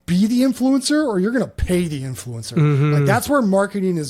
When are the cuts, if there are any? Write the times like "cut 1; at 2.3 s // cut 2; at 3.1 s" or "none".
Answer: none